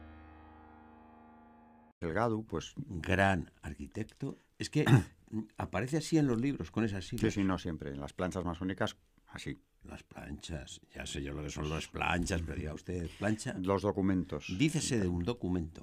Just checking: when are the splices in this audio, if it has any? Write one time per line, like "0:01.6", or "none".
none